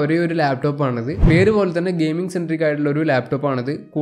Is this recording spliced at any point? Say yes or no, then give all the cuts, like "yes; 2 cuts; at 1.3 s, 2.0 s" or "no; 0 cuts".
yes; 1 cut; at 1.2 s